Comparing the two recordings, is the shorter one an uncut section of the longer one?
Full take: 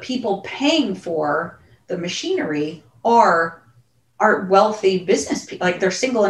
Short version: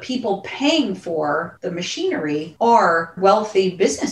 no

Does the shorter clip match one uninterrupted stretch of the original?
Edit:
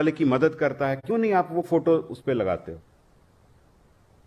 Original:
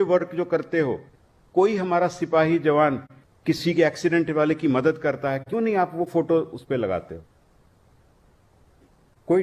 yes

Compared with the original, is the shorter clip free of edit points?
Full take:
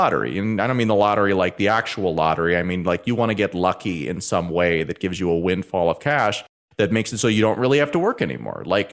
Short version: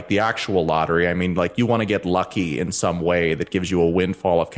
yes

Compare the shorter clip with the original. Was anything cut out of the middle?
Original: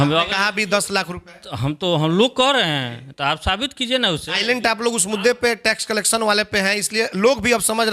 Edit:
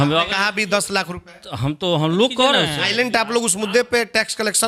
yes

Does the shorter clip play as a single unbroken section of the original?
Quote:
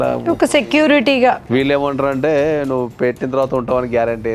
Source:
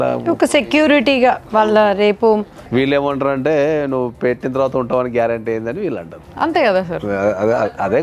no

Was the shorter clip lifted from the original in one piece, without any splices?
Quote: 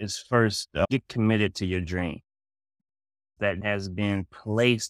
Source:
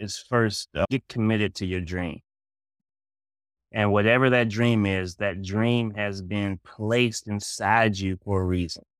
no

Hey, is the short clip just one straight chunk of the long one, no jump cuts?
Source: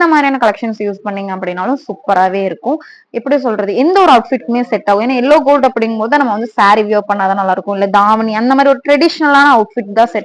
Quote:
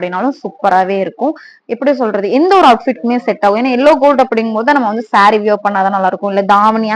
yes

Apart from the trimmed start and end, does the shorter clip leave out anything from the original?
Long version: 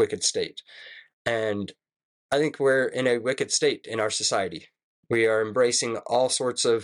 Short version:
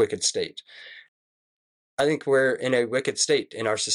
yes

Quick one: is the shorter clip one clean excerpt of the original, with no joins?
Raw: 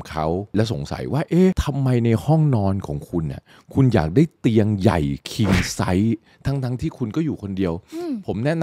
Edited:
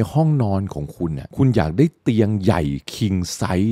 no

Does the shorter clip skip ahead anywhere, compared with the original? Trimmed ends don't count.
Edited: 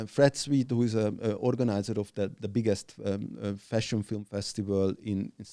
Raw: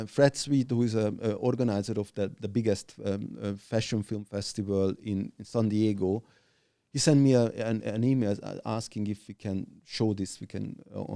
no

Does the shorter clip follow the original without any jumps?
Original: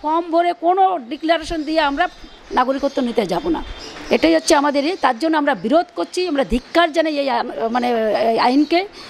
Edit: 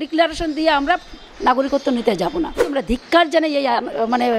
no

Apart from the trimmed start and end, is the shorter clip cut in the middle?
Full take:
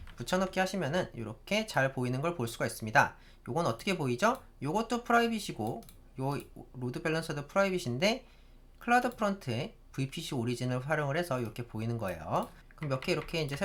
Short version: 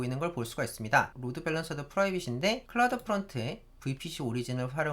yes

